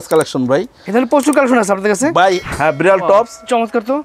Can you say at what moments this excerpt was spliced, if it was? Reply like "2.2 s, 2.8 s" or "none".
2.5 s

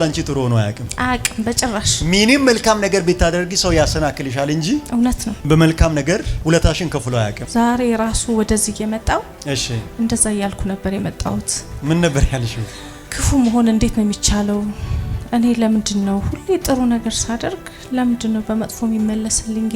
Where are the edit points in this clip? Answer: none

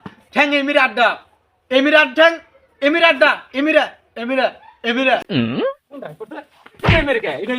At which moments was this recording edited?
5.2 s

